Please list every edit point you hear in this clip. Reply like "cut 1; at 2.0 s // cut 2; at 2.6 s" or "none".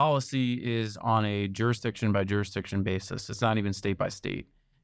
none